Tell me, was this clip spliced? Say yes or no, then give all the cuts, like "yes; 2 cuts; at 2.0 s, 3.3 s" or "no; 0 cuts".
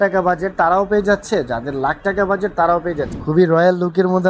yes; 1 cut; at 3.1 s